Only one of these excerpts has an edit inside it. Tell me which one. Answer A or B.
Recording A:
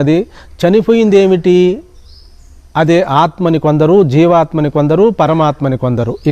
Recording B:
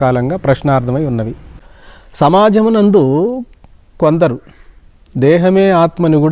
B